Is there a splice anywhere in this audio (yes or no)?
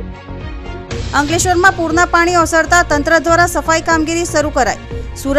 yes